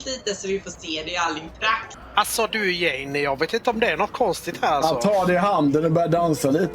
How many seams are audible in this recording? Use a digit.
1